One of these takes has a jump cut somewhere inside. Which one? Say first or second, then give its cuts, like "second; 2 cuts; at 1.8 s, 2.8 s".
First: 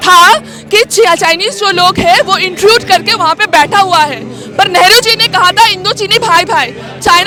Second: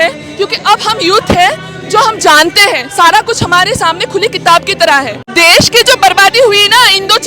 second; 1 cut; at 5.2 s